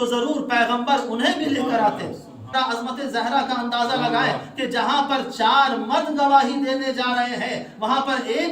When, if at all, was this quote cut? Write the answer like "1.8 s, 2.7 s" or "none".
2.5 s